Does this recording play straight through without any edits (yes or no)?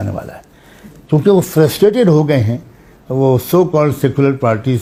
yes